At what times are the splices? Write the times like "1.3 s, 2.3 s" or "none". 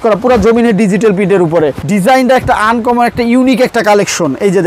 1.8 s